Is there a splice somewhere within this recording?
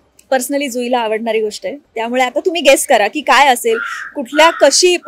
no; 0 cuts

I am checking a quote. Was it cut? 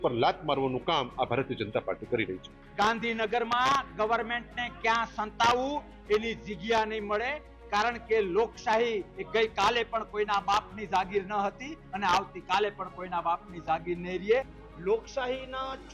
yes; 2 cuts; at 2.6 s, 14.6 s

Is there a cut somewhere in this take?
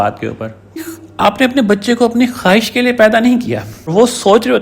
yes; 2 cuts; at 1.0 s, 3.9 s

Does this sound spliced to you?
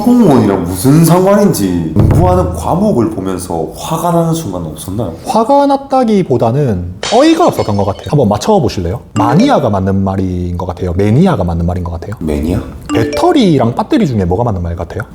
yes; 3 cuts; at 1.9 s, 8.0 s, 12.9 s

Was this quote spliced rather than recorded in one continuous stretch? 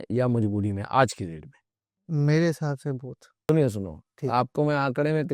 yes; 1 cut; at 3.3 s

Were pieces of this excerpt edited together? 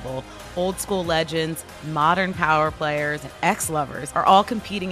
yes; 1 cut; at 3.6 s

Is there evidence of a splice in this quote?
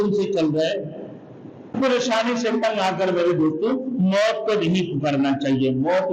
yes; 1 cut; at 1.7 s

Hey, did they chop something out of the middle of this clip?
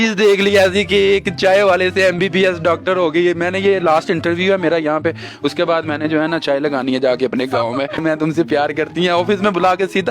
yes; 1 cut; at 8.0 s

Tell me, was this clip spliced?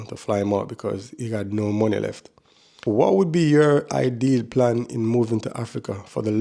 yes; 1 cut; at 2.7 s

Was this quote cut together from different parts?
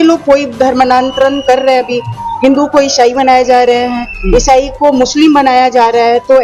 no; 0 cuts

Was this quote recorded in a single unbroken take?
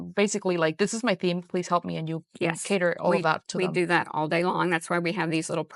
yes; 0 cuts

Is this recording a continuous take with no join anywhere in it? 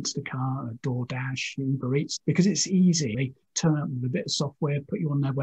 no; 2 cuts; at 2.1 s, 3.2 s

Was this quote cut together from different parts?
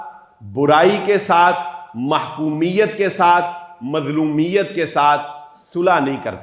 no; 0 cuts

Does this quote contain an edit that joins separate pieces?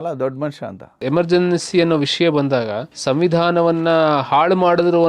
yes; 1 cut; at 1.0 s

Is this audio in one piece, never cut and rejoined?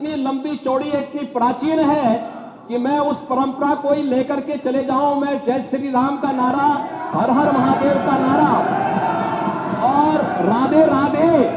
yes; 0 cuts

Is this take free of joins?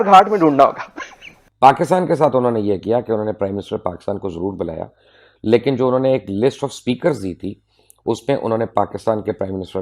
yes; 0 cuts

